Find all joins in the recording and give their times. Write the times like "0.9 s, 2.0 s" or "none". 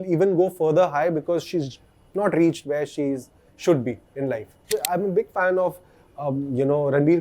4.7 s